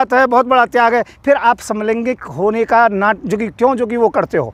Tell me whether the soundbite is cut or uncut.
uncut